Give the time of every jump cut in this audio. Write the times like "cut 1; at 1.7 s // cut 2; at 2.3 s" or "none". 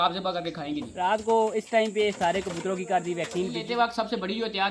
cut 1; at 0.9 s // cut 2; at 3.6 s